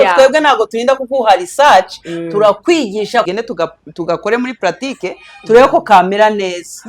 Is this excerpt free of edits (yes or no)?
no